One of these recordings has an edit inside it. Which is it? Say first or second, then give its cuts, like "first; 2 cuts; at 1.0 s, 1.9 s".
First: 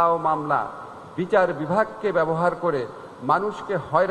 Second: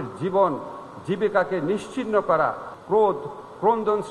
second; 1 cut; at 2.7 s